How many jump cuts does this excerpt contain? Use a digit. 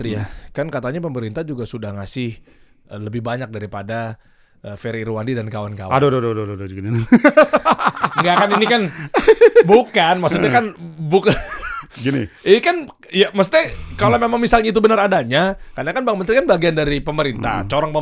0